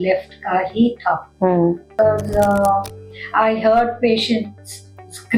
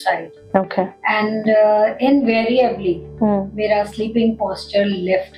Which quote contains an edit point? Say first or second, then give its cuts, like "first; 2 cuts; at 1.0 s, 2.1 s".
first; 1 cut; at 1.9 s